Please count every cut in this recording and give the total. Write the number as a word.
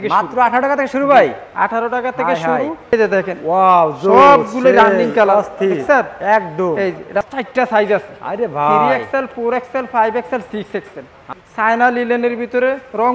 three